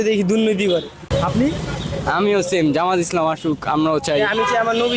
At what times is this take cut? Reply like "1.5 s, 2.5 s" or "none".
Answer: 1.1 s